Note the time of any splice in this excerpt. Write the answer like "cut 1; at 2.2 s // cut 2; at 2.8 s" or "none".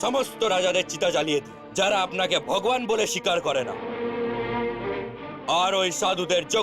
cut 1; at 3.7 s // cut 2; at 5.0 s